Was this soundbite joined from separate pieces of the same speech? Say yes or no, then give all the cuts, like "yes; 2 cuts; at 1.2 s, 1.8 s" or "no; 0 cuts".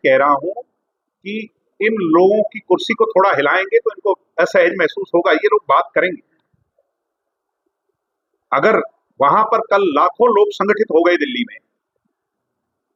no; 0 cuts